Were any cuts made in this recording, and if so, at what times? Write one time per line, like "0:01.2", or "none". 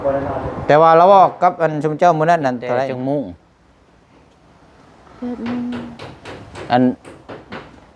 0:02.9